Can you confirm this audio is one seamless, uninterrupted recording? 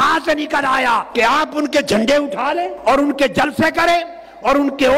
no; 2 cuts; at 1.1 s, 2.8 s

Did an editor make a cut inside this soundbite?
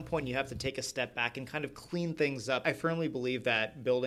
yes; 1 cut; at 2.6 s

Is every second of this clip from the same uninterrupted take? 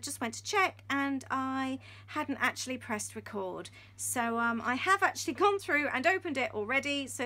yes; 0 cuts

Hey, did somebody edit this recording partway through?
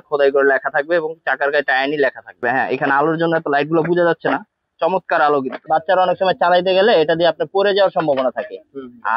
yes; 2 cuts; at 2.4 s, 5.6 s

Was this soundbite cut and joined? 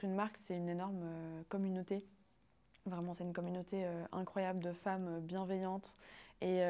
no; 0 cuts

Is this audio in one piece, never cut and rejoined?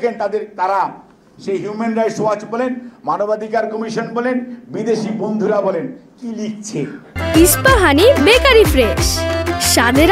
yes; 0 cuts

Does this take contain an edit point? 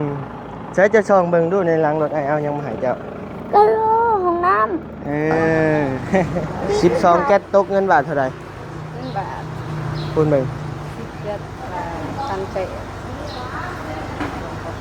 yes; 1 cut; at 6.8 s

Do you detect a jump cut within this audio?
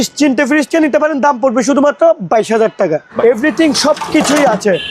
yes; 1 cut; at 3.1 s

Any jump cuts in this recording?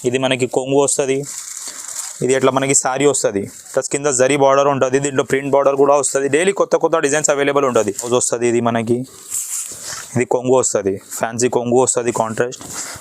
yes; 1 cut; at 8.1 s

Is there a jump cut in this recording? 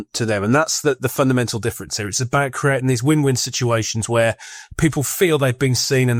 no; 0 cuts

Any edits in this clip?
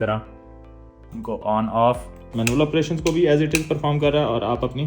yes; 1 cut; at 2.2 s

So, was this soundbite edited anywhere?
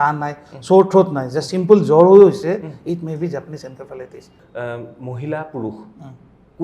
yes; 1 cut; at 4.4 s

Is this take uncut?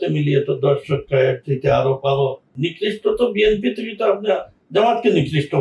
no; 1 cut; at 2.8 s

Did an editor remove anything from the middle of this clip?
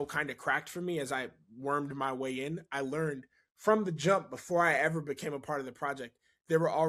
no; 0 cuts

